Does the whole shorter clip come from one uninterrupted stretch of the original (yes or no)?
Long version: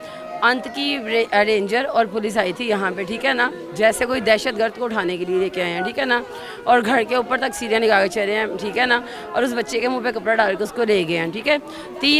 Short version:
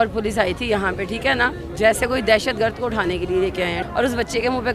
no